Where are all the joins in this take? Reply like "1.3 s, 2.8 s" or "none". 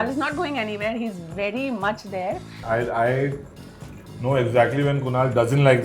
2.6 s